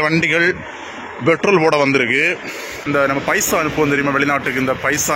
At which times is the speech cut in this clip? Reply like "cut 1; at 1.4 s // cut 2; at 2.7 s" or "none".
cut 1; at 2.7 s